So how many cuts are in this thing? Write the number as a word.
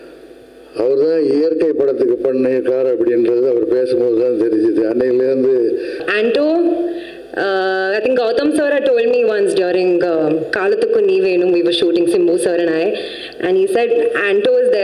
one